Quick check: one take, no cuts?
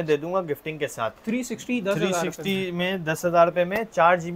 yes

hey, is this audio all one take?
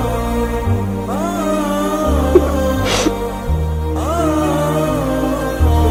yes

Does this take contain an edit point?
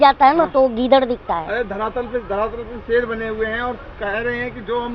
no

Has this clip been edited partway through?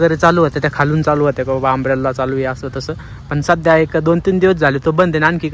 no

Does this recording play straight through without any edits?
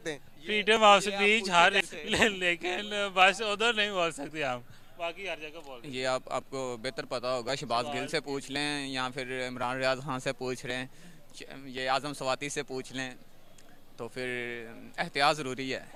yes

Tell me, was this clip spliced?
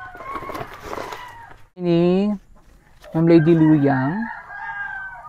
yes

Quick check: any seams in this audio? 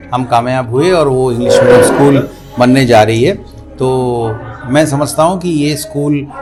no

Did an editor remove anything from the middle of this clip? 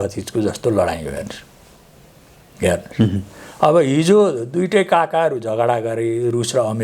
no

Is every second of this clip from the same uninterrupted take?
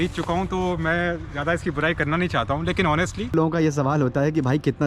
no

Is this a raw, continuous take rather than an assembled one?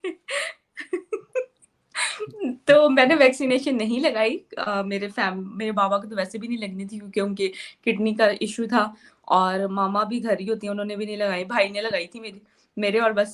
yes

